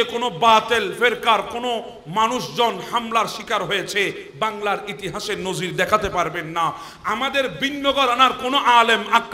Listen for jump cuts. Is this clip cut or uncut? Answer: uncut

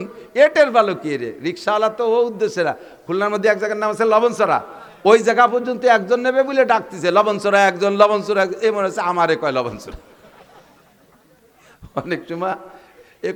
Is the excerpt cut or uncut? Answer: uncut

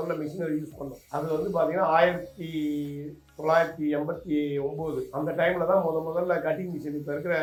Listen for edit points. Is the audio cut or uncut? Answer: uncut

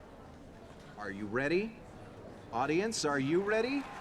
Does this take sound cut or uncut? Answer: cut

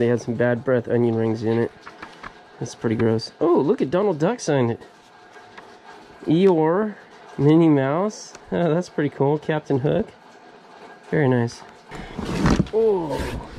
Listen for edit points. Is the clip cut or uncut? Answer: uncut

